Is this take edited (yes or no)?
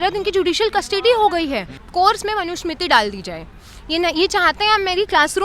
yes